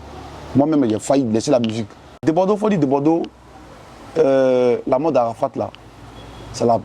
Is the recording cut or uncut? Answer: cut